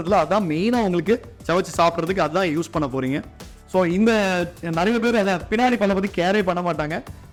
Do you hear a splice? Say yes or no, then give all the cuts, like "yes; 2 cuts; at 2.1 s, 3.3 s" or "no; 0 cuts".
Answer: no; 0 cuts